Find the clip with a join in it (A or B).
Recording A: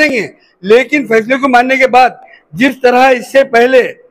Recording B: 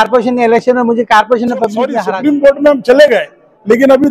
B